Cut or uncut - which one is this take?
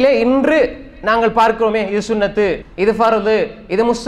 cut